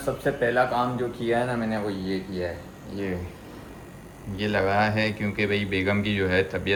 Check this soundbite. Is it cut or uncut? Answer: uncut